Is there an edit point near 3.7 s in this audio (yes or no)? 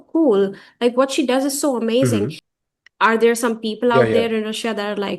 no